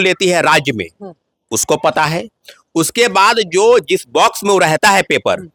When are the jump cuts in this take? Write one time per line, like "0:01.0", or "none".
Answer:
none